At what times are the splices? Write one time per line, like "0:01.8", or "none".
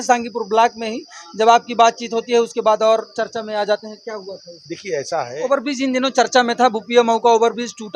0:05.4